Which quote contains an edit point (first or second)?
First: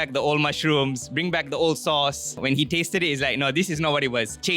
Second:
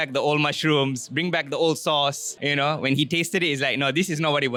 first